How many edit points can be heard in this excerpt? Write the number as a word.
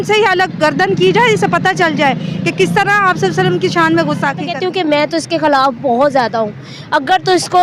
one